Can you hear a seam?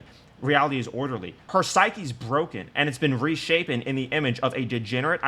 yes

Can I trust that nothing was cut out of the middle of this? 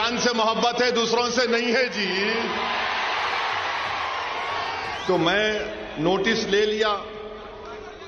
no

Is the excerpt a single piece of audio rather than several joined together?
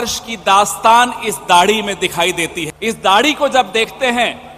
no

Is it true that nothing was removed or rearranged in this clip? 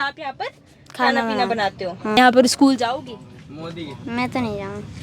no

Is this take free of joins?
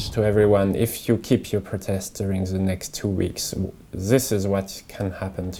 yes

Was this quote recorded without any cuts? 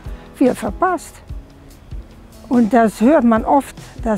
yes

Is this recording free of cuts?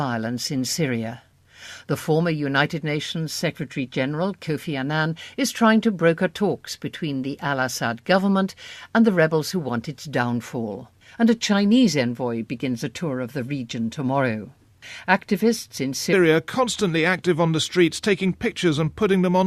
yes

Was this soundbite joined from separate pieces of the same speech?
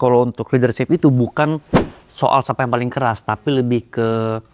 no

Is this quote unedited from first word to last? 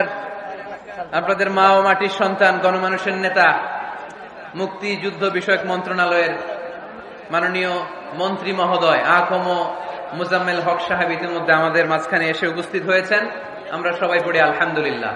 yes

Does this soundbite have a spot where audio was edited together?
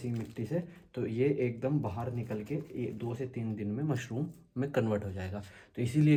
no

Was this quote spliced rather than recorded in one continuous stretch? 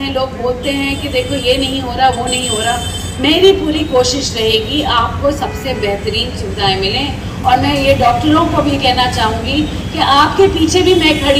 no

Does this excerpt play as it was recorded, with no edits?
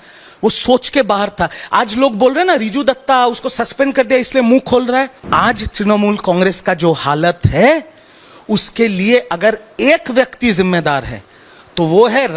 no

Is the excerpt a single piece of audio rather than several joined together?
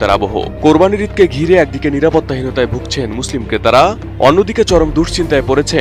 yes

